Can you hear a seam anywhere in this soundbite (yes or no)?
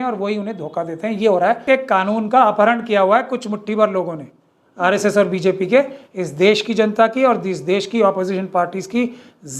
yes